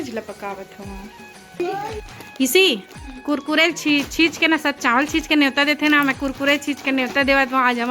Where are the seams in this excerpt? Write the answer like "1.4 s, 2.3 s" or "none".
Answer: 1.6 s